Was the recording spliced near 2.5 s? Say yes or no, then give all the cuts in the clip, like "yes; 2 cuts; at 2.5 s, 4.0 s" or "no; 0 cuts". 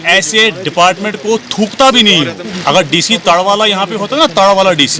yes; 1 cut; at 2.5 s